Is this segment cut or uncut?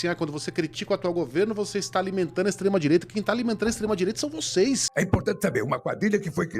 cut